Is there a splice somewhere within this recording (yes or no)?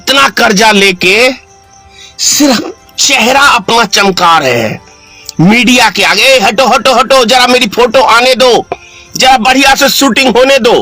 no